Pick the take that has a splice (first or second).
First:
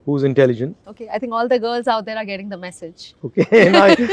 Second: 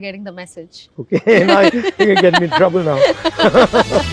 first